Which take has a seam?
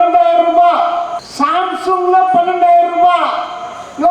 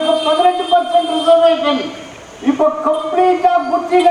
first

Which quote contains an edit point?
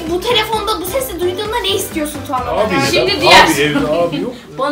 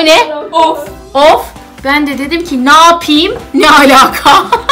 first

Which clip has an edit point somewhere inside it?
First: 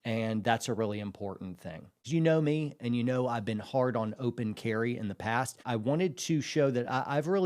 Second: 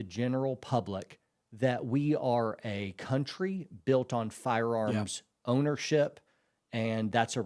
first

